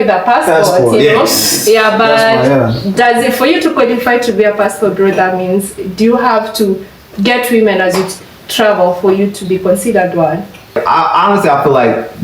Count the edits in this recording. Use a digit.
1